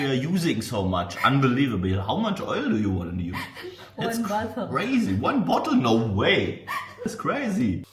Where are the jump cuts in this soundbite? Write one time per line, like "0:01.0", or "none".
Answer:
none